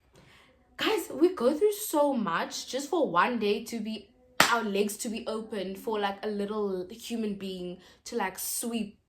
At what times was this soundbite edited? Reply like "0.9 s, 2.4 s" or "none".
none